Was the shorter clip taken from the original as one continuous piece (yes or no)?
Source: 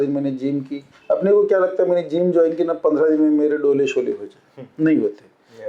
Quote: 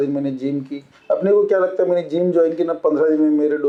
yes